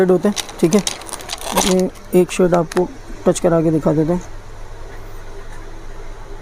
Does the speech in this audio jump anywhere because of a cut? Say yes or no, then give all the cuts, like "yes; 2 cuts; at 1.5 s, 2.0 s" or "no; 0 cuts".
no; 0 cuts